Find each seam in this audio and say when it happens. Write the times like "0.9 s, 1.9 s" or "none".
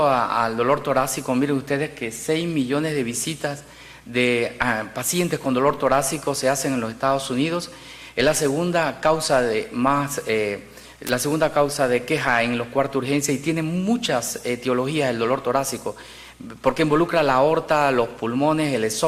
14.6 s